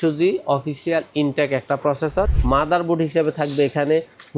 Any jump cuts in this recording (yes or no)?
yes